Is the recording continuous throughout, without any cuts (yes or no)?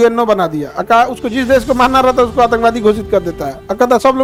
yes